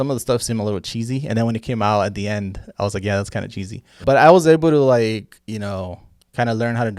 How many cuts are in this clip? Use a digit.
1